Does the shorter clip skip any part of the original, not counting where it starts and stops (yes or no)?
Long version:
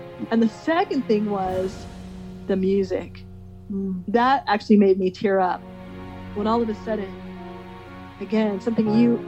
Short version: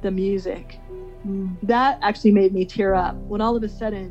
yes